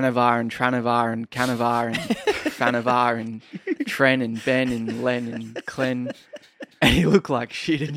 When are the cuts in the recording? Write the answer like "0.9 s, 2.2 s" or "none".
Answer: none